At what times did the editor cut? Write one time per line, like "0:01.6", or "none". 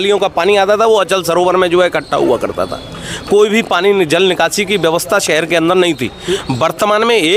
none